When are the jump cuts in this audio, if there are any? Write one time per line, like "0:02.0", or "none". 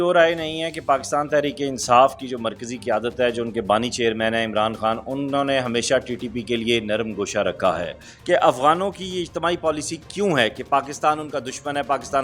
0:08.1

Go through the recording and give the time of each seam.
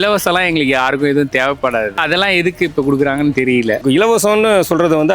0:02.0
0:03.8

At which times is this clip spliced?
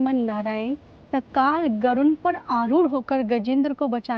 none

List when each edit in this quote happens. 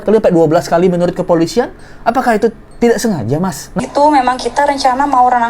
0:03.7

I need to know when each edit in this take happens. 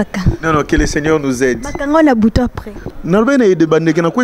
0:02.9

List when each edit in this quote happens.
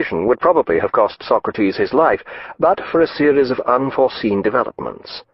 0:02.2

